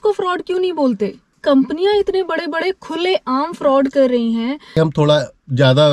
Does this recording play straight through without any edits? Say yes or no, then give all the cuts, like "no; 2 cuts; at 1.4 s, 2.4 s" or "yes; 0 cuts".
no; 2 cuts; at 1.3 s, 4.8 s